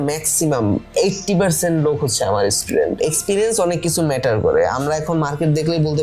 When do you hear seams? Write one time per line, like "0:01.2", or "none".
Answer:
0:03.0